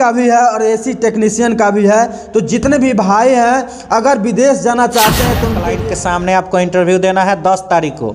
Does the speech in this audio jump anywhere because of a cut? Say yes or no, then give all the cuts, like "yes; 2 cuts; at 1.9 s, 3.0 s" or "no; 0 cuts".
yes; 1 cut; at 5.7 s